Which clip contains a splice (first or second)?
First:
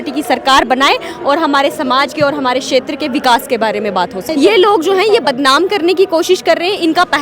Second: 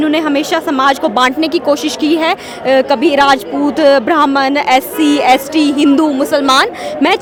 first